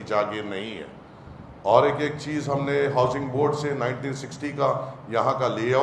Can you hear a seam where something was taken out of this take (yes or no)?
no